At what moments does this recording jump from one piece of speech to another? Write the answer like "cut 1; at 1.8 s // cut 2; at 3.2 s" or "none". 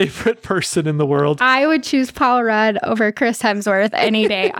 none